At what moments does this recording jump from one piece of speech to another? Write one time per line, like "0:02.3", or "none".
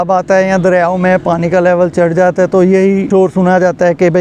0:03.0